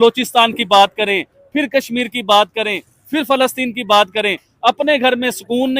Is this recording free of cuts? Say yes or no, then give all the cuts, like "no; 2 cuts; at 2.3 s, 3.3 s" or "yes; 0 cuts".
yes; 0 cuts